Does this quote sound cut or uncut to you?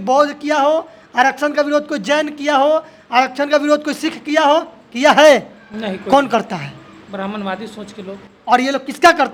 uncut